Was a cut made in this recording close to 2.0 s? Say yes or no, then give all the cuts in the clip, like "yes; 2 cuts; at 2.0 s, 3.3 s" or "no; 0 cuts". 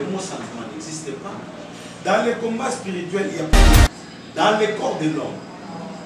no; 1 cut; at 3.8 s